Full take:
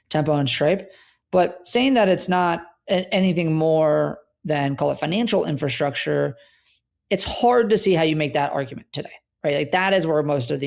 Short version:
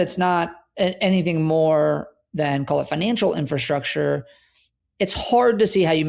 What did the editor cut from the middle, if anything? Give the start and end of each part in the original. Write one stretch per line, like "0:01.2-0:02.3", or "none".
none